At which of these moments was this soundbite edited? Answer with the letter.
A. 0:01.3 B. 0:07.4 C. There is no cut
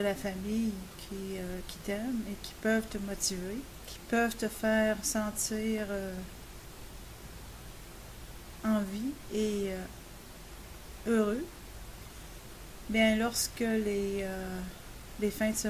C